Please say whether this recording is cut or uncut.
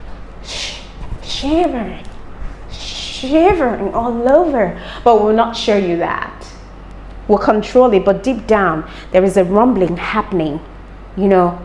uncut